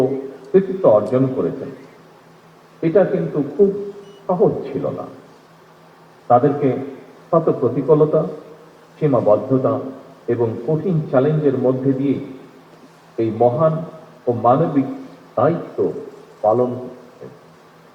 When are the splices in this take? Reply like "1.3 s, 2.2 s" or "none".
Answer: none